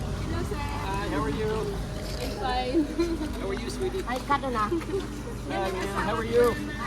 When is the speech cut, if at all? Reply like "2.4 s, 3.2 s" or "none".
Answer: none